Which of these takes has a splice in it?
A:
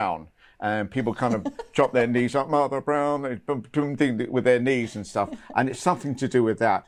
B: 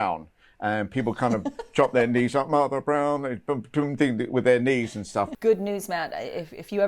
B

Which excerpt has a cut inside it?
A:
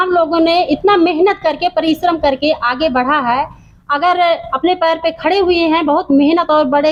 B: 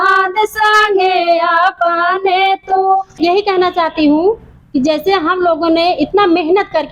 B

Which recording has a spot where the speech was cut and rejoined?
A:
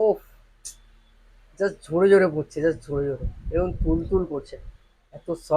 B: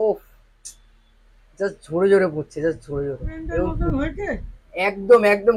B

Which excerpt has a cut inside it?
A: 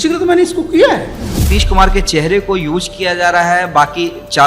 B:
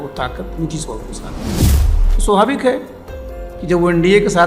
A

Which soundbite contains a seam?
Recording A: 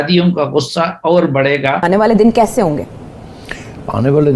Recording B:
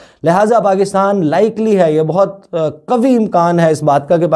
A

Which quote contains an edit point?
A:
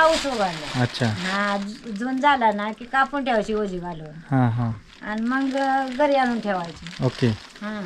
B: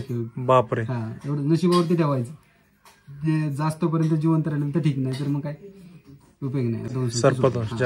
B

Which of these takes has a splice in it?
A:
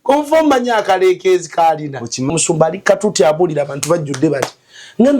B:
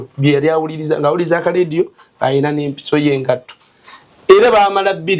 A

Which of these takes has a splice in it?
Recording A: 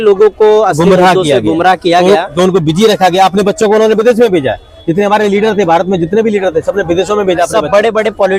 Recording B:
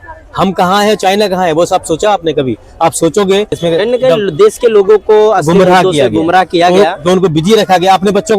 B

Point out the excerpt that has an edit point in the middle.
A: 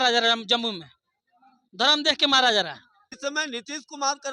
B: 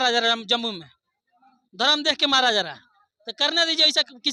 A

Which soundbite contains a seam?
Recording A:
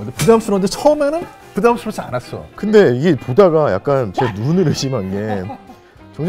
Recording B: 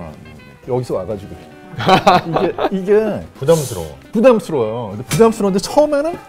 A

